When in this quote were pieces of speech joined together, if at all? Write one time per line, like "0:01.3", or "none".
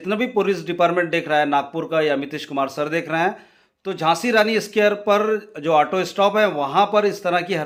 none